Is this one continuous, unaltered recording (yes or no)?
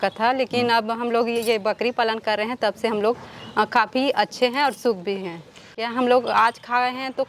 no